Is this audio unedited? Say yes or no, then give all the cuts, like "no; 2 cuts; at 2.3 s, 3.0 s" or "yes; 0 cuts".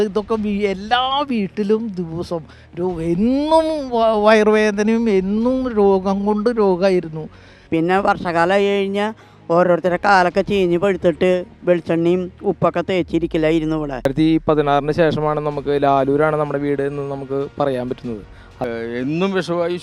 no; 3 cuts; at 7.6 s, 13.9 s, 18.6 s